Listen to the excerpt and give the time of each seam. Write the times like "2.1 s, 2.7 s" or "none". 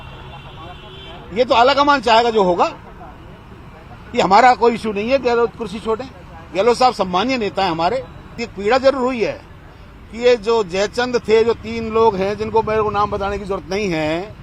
8.5 s